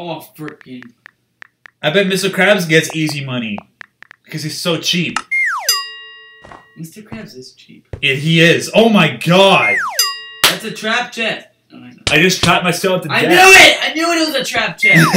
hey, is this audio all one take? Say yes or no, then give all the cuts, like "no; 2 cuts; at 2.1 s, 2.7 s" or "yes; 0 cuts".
yes; 0 cuts